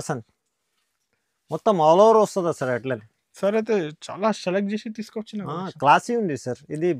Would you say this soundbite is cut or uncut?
uncut